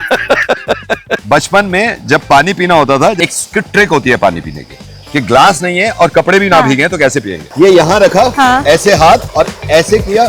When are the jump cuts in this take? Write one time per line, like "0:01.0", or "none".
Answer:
0:01.2
0:03.2
0:07.5